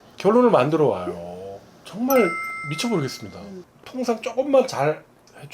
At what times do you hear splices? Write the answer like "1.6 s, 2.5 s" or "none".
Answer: 3.5 s